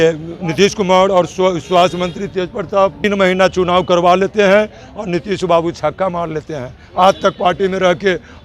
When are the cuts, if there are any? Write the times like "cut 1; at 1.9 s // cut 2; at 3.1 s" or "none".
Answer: cut 1; at 3.0 s